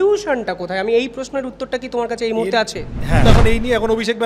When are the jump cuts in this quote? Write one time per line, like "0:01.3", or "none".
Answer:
0:03.3